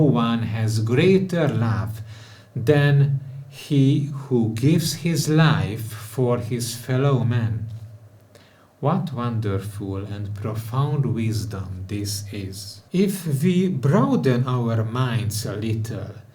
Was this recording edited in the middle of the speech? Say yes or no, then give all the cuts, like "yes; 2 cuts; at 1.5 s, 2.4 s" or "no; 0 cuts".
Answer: yes; 1 cut; at 12.7 s